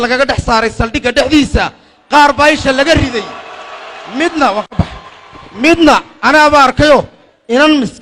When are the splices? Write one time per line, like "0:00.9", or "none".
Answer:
none